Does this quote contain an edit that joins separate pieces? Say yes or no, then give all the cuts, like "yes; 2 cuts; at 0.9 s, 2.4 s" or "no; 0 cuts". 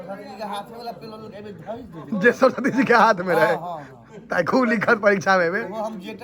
no; 0 cuts